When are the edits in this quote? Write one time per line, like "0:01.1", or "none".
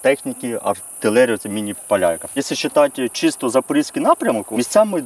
0:00.9
0:01.8
0:02.4

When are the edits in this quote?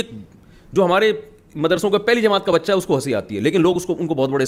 none

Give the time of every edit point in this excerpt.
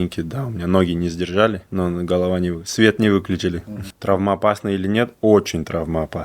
0:01.6
0:03.6

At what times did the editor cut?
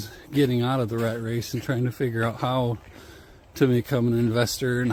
none

